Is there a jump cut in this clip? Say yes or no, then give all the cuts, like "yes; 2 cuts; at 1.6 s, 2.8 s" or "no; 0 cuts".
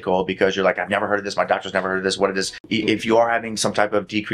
yes; 1 cut; at 2.7 s